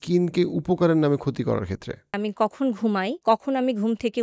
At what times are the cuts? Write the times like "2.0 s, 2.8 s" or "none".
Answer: 2.2 s, 3.2 s

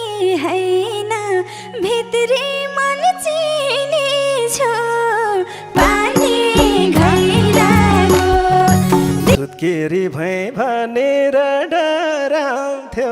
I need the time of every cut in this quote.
9.4 s

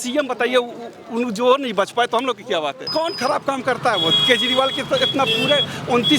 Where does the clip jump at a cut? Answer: 2.8 s

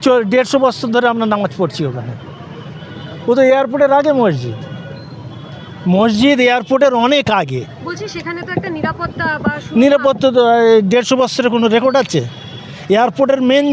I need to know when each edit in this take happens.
none

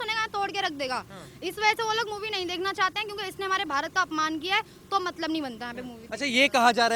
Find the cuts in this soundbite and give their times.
none

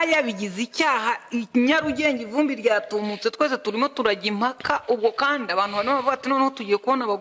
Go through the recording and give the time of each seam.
none

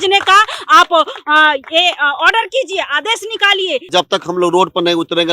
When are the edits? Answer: 3.9 s

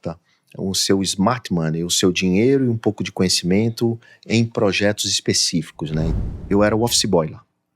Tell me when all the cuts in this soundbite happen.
6.1 s

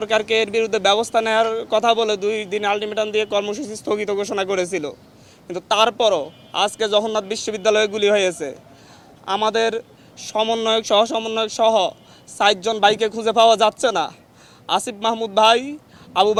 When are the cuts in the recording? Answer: none

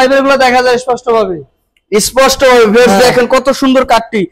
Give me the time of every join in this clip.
none

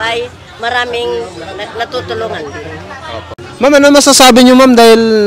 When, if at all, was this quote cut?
3.4 s

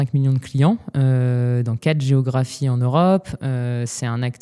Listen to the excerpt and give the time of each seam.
none

